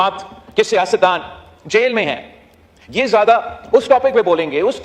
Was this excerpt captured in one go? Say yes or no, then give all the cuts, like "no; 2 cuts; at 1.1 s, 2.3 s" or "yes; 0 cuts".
yes; 0 cuts